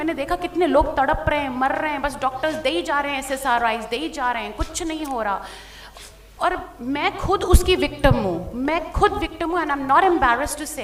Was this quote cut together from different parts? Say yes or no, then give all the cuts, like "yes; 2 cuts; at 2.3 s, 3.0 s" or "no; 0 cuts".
no; 0 cuts